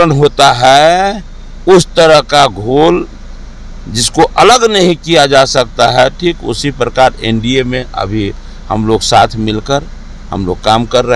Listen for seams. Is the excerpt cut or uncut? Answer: uncut